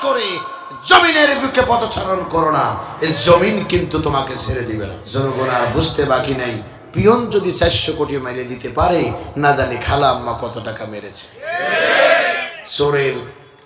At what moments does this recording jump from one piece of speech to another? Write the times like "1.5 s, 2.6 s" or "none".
5.0 s